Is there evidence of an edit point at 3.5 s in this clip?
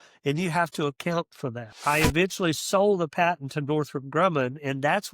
no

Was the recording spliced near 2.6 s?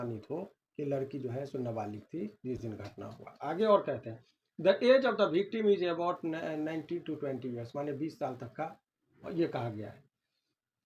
no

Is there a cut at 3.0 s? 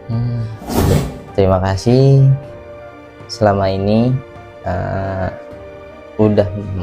no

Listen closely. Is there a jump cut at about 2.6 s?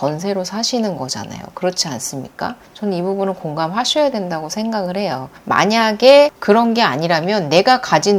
no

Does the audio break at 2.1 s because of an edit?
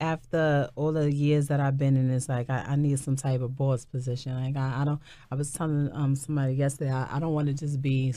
no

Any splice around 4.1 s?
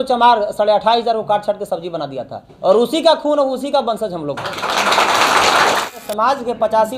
no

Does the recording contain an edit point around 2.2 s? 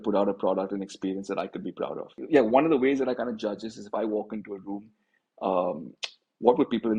yes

